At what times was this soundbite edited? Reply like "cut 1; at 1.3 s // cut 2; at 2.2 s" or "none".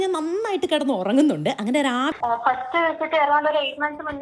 cut 1; at 2.1 s